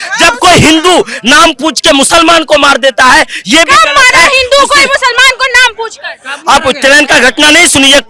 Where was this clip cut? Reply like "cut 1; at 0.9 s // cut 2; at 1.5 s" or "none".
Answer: none